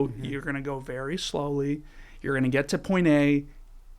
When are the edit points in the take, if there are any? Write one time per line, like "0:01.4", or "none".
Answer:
none

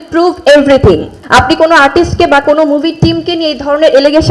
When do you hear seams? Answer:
0:01.1

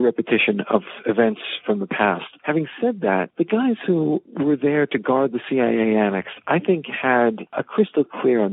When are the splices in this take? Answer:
0:00.9
0:02.3
0:03.3
0:04.3
0:07.6

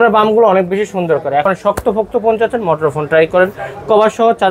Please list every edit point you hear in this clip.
0:01.4

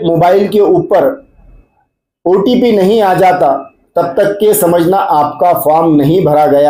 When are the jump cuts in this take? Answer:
none

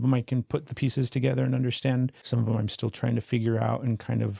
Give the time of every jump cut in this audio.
0:02.2

